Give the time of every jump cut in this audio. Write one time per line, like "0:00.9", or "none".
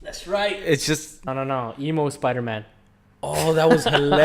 0:01.1

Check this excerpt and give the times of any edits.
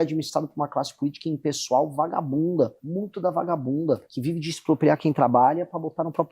0:02.8
0:04.1

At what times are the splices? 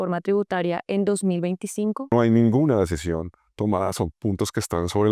0:02.1

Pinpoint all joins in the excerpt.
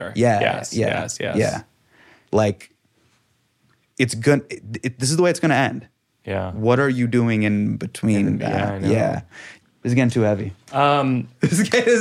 0:02.1
0:09.8

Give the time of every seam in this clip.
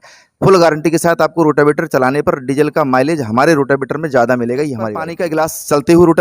0:05.2

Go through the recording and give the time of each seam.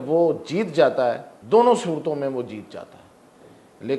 0:01.3

